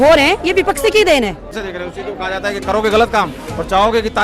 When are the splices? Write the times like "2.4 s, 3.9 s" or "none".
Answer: 1.6 s